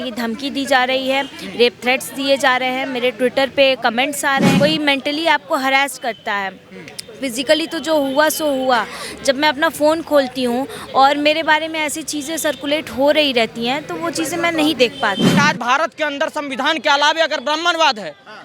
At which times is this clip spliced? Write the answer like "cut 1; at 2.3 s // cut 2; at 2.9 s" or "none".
cut 1; at 4.6 s // cut 2; at 15.3 s